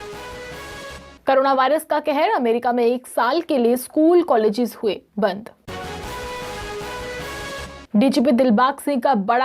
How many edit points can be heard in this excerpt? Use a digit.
0